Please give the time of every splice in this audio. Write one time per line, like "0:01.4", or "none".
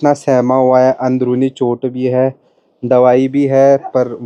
none

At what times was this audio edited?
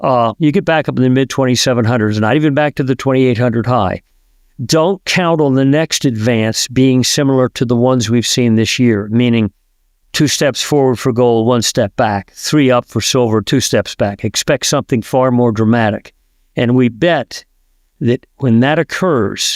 none

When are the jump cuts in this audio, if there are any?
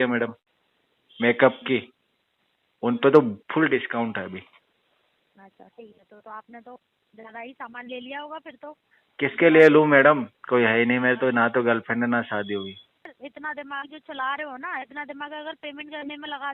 0:13.1

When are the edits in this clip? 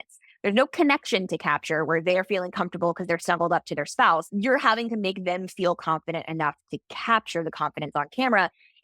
0:04.3

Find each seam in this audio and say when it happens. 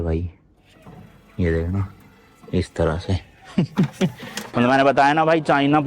0:04.5

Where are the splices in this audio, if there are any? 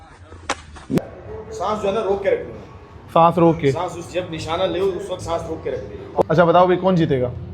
0:01.0
0:06.2

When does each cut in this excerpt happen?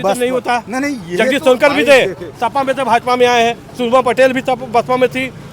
none

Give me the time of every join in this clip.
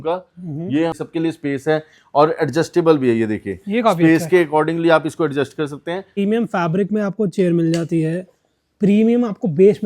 0:01.0
0:06.2

